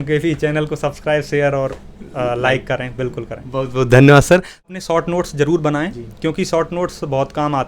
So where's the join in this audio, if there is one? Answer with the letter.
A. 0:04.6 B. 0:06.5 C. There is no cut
A